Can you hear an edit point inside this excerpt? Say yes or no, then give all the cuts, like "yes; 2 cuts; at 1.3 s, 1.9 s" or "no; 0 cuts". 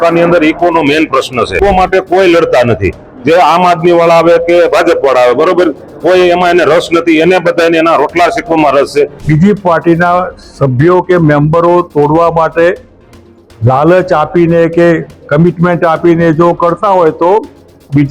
yes; 2 cuts; at 1.6 s, 9.2 s